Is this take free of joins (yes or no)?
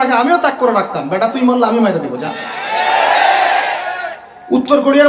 yes